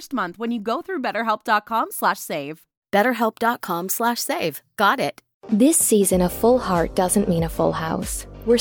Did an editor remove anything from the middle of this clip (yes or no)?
yes